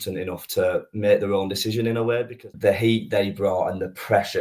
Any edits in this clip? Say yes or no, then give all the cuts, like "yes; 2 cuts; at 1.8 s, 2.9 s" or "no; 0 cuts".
yes; 1 cut; at 2.5 s